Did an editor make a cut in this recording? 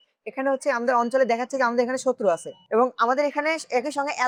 no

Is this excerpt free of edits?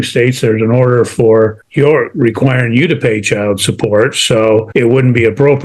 no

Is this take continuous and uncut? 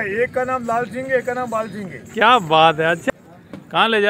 no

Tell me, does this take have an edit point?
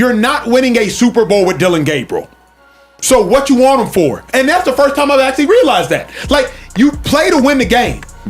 yes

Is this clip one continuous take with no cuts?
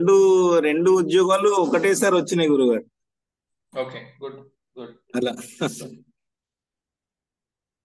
yes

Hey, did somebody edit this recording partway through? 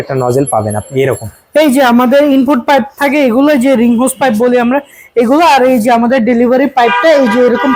no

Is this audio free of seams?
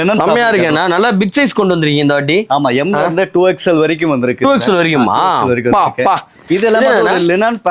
no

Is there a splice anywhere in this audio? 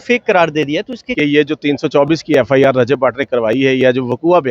yes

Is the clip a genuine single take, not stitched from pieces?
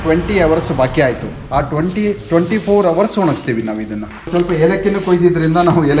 no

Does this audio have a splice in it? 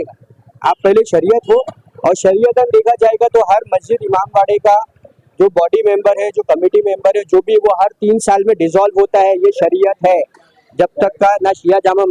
no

